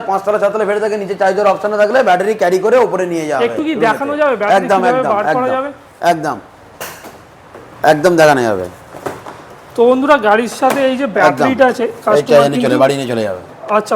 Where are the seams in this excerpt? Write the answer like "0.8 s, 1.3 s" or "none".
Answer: none